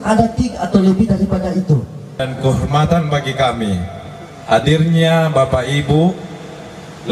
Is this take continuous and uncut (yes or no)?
no